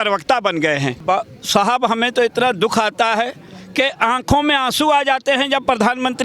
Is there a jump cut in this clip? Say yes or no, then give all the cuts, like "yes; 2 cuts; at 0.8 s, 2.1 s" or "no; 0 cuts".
no; 0 cuts